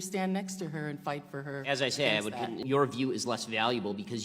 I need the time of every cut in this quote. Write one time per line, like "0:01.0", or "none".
0:02.6